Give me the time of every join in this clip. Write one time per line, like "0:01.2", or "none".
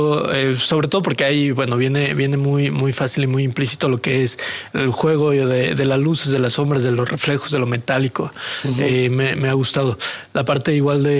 none

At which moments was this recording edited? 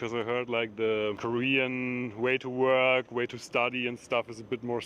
0:01.2

